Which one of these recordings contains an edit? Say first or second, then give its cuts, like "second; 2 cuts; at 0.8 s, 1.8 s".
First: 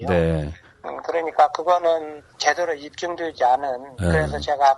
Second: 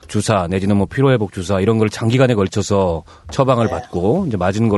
first; 1 cut; at 1.1 s